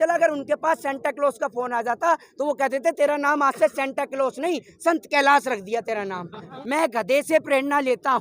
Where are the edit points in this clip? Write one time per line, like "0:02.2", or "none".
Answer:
0:06.5

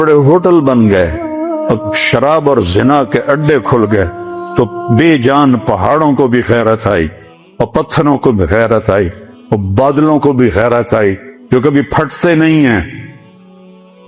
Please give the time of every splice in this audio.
none

